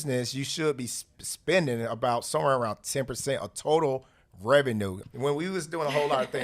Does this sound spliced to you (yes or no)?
yes